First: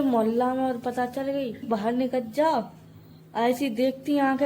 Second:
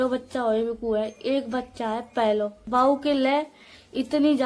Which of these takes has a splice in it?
first; 1 cut; at 1.6 s

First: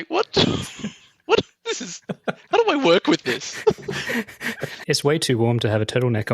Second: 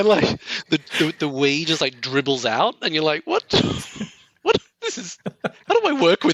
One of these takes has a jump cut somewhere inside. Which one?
first; 1 cut; at 4.7 s

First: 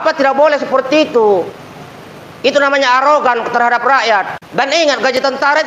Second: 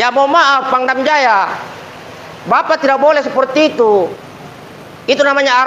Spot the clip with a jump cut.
first; 1 cut; at 4.4 s

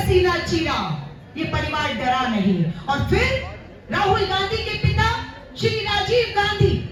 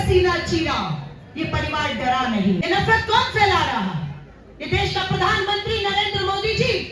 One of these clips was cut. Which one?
second; 1 cut; at 2.6 s

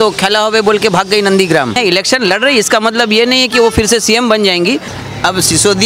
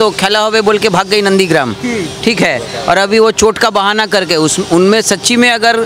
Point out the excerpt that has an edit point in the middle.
first; 2 cuts; at 1.8 s, 4.9 s

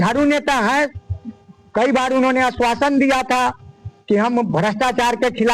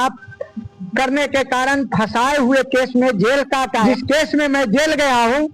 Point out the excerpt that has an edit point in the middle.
second; 1 cut; at 3.7 s

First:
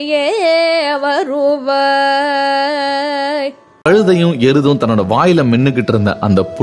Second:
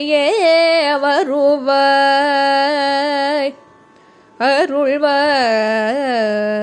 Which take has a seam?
first; 1 cut; at 3.7 s

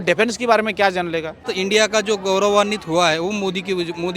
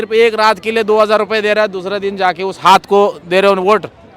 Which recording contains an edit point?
first; 1 cut; at 1.5 s

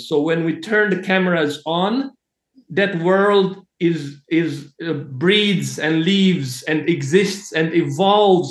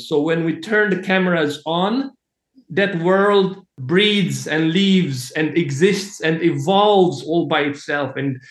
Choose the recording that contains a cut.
second; 1 cut; at 3.7 s

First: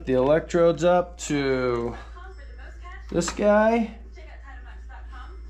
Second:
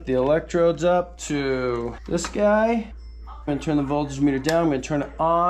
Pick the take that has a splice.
second; 2 cuts; at 2.0 s, 3.5 s

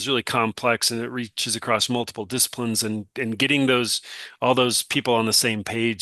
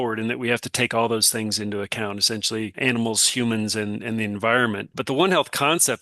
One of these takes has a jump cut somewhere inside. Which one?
second; 2 cuts; at 2.7 s, 4.9 s

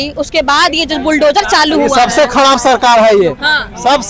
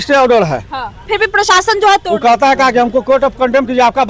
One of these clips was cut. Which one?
second; 1 cut; at 1.0 s

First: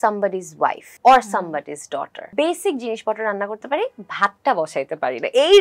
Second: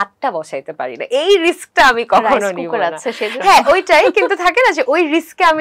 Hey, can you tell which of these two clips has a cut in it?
first; 2 cuts; at 0.9 s, 2.3 s

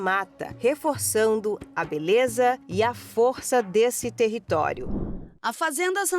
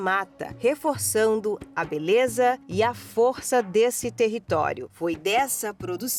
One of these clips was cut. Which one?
first; 1 cut; at 4.9 s

